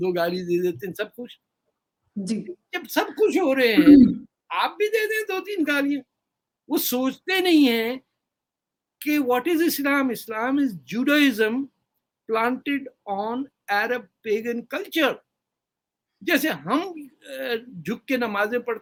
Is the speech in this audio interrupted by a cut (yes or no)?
no